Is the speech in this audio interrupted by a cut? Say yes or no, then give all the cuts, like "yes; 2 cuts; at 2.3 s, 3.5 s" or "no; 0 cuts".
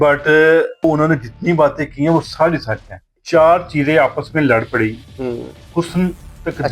yes; 2 cuts; at 0.8 s, 3.2 s